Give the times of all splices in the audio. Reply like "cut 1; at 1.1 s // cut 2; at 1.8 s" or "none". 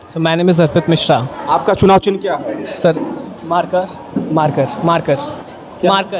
none